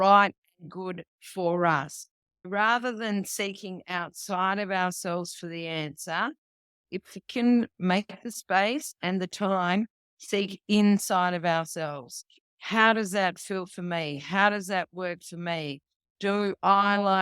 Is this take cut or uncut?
cut